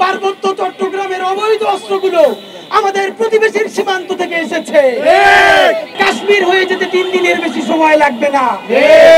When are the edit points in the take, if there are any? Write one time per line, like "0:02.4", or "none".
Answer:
0:05.9